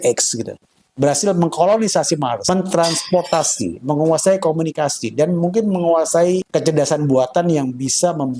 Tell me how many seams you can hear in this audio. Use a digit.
1